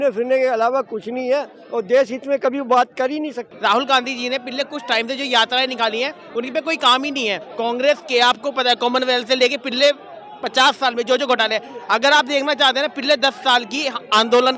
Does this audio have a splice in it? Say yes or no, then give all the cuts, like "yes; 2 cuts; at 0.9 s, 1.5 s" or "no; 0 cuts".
yes; 2 cuts; at 3.4 s, 7.5 s